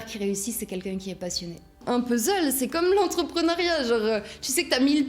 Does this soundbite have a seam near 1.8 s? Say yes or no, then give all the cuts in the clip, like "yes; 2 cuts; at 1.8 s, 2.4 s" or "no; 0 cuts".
yes; 1 cut; at 1.8 s